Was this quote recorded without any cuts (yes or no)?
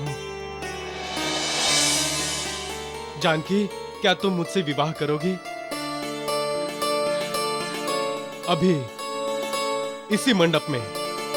yes